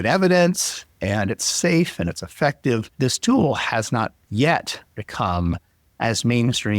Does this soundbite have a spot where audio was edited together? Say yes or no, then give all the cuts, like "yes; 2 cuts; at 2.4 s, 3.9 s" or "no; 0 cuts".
yes; 1 cut; at 2.9 s